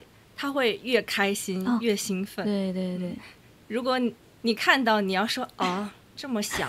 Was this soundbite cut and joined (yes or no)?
no